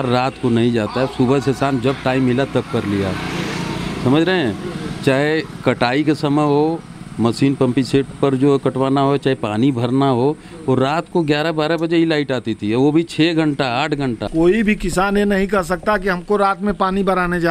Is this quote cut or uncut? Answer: cut